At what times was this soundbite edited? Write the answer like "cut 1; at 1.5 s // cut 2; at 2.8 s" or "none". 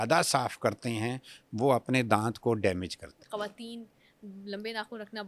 cut 1; at 3.1 s